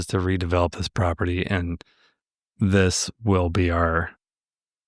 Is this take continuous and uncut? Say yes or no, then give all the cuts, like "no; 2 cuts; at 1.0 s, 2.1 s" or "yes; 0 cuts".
yes; 0 cuts